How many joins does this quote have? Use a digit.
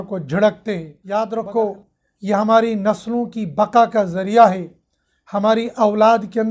1